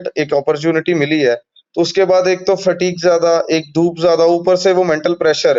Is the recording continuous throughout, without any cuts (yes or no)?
yes